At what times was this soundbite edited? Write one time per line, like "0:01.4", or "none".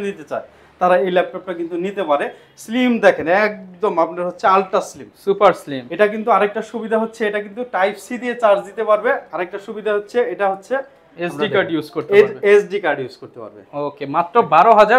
none